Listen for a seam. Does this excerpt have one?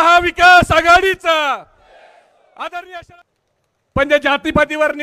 yes; 1 cut; at 3.0 s

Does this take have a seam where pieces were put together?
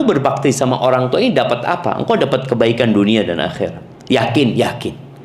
yes; 1 cut; at 3.9 s

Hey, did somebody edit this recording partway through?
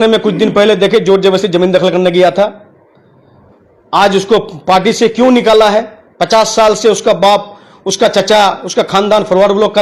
no; 0 cuts

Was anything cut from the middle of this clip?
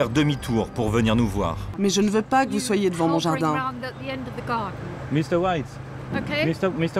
yes; 1 cut; at 1.7 s

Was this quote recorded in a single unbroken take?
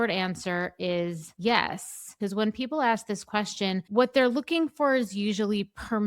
no; 2 cuts; at 1.3 s, 2.1 s

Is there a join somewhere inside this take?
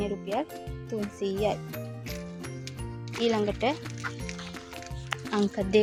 no; 0 cuts

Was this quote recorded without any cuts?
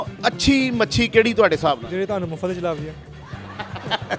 yes; 0 cuts

